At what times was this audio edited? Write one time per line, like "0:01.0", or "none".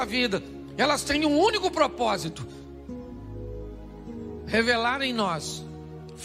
0:02.3
0:03.8